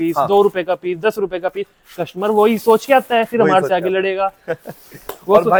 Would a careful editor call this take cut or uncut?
uncut